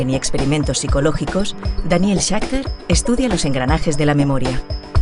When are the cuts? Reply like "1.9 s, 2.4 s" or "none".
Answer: 2.5 s